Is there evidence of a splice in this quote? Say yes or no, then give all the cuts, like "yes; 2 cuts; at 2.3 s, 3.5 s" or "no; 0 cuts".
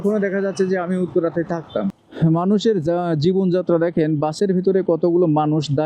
yes; 1 cut; at 2.0 s